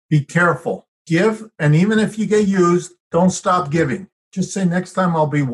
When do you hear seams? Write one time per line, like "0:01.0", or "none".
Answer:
0:00.9
0:04.2